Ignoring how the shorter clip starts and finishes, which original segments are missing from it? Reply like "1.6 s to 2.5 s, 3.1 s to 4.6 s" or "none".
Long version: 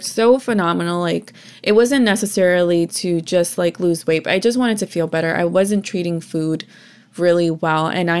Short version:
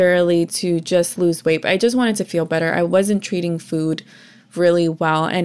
3.5 s to 3.7 s